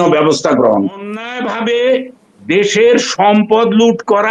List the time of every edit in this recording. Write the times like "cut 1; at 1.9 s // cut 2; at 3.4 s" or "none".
cut 1; at 1.3 s